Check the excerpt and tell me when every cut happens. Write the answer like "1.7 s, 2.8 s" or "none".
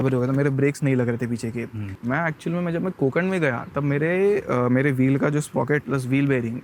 none